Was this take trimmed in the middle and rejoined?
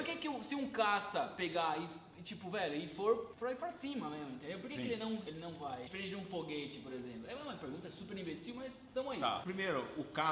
yes; 3 cuts; at 3.3 s, 5.3 s, 9.4 s

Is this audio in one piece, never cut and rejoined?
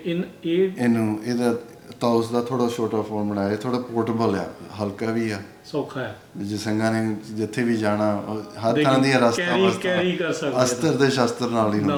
yes; 0 cuts

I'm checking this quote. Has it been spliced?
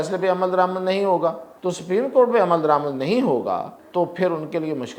yes; 2 cuts; at 1.5 s, 3.8 s

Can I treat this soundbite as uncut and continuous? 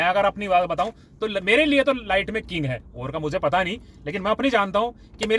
yes; 0 cuts

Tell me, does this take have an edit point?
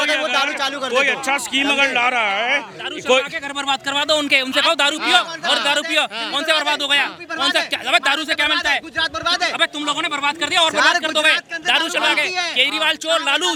no; 0 cuts

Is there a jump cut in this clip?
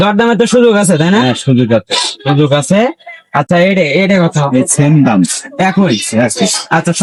no; 0 cuts

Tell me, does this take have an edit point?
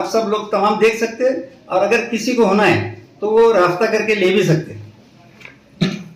no; 0 cuts

